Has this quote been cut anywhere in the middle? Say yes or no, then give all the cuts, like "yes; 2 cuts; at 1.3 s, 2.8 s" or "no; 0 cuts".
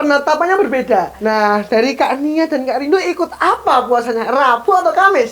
yes; 1 cut; at 1.1 s